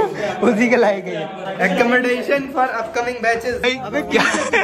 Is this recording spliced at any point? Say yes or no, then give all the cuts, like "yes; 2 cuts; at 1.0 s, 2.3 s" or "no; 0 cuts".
yes; 2 cuts; at 1.3 s, 3.6 s